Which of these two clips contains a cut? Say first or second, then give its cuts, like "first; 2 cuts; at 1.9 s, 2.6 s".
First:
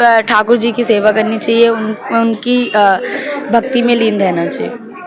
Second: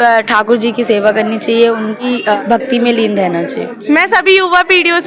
second; 2 cuts; at 2.0 s, 3.7 s